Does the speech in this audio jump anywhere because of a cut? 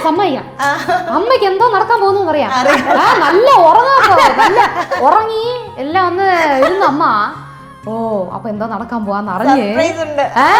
no; 0 cuts

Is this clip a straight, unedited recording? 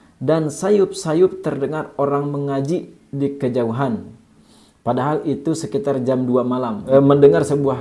no; 1 cut; at 6.8 s

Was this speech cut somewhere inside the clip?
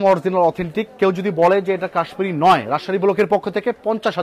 no; 0 cuts

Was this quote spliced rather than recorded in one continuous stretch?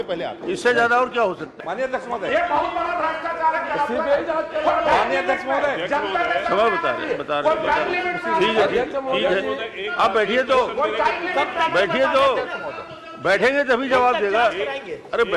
yes; 1 cut; at 1.6 s

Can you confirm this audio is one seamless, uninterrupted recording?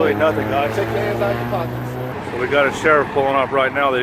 no; 1 cut; at 2.1 s

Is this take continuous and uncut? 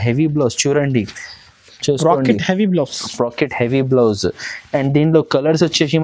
yes; 0 cuts

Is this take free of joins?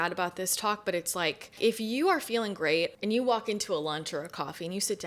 no; 2 cuts; at 1.6 s, 3.0 s

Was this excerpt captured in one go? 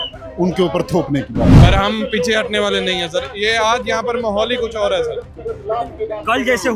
no; 1 cut; at 1.5 s

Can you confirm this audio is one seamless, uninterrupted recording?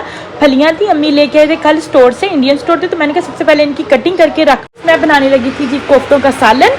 no; 1 cut; at 4.7 s

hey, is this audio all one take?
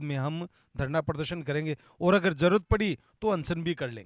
yes; 0 cuts

